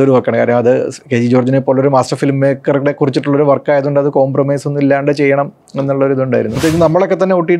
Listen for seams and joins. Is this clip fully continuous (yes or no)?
no